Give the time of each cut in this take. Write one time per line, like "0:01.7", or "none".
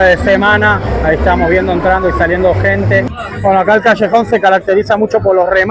0:03.1